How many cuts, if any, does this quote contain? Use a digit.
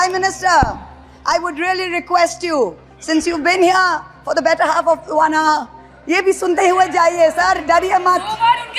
0